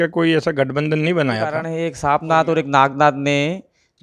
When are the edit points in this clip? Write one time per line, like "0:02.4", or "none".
0:01.7